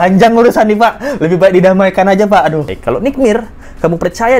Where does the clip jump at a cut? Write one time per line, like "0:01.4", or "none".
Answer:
0:02.7